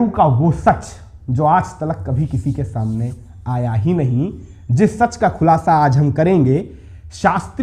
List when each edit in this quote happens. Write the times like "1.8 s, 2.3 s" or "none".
none